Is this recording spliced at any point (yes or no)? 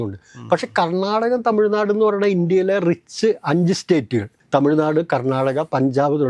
yes